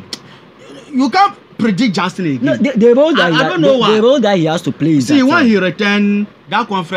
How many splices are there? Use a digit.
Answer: 0